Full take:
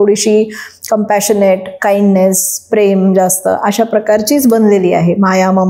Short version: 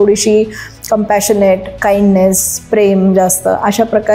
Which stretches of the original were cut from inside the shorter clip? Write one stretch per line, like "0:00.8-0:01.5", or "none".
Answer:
none